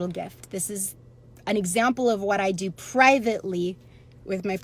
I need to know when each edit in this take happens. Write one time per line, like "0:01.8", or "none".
none